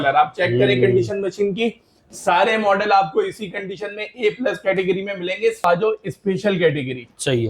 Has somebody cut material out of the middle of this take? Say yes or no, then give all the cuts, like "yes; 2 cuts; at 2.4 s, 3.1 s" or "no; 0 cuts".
yes; 1 cut; at 5.6 s